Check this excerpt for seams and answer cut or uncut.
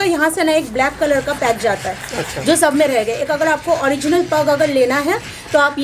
uncut